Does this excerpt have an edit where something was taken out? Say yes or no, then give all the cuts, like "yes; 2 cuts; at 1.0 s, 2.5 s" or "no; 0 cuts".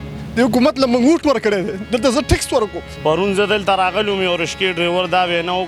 yes; 1 cut; at 2.8 s